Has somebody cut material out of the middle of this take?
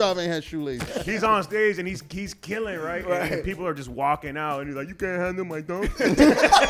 yes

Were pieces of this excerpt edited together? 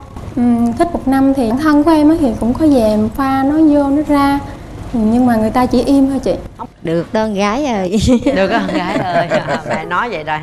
yes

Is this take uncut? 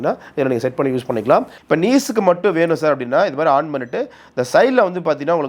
no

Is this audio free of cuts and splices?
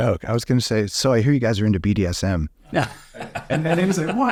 yes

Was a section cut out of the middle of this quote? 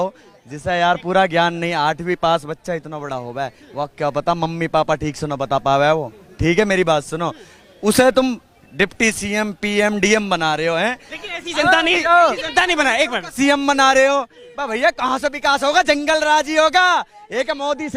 no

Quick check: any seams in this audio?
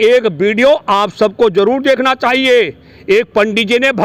no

